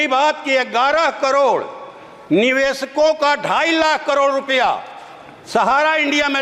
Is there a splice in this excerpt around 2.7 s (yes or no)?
no